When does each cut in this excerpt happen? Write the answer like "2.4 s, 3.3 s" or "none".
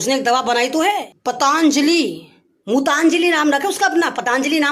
1.1 s